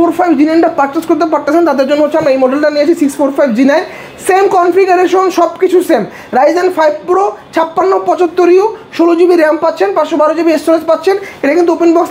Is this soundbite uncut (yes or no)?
yes